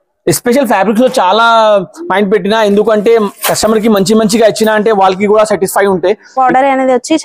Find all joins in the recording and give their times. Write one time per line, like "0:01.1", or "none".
0:06.3